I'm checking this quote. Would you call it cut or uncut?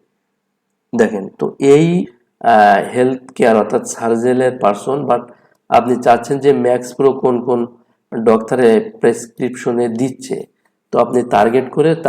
cut